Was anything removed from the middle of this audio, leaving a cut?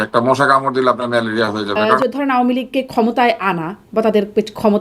yes; 1 cut; at 1.8 s

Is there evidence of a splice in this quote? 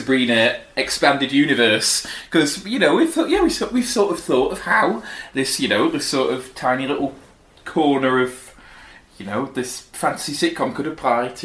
no; 0 cuts

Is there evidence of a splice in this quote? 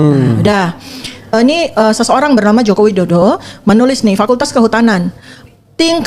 yes; 1 cut; at 1.3 s

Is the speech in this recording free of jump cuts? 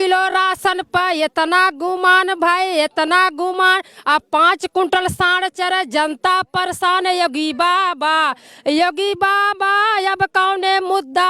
yes; 0 cuts

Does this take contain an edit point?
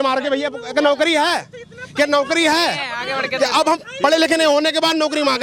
no; 0 cuts

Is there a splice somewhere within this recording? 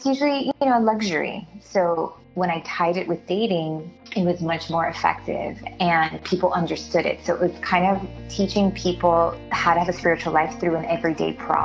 no; 0 cuts

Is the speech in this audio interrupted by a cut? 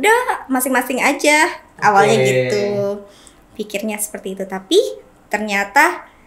no; 0 cuts

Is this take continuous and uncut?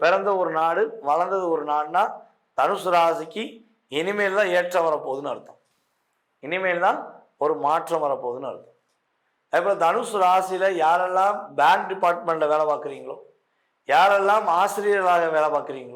yes; 0 cuts

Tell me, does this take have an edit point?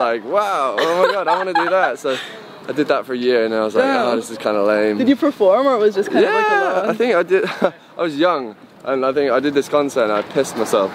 no; 0 cuts

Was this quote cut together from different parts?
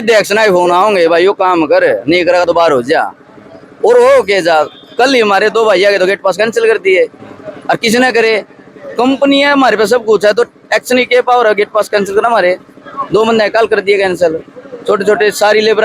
no; 0 cuts

